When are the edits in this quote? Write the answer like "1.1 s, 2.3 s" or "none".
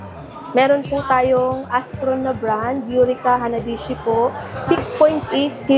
4.5 s